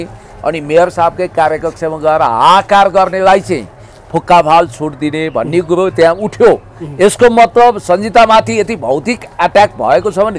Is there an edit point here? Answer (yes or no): no